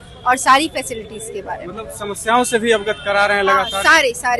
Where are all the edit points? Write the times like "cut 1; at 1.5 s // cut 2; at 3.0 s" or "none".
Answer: none